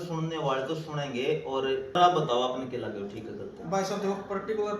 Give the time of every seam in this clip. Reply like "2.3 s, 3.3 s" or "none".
2.0 s